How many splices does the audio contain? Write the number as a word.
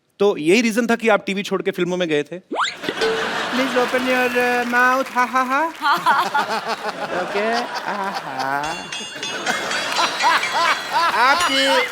one